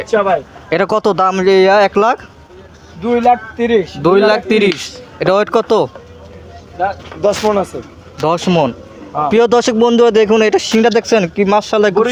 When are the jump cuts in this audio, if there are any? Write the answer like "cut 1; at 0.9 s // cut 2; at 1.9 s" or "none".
none